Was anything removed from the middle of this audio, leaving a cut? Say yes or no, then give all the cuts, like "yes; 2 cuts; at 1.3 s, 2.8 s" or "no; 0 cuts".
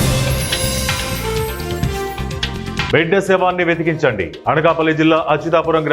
yes; 1 cut; at 2.9 s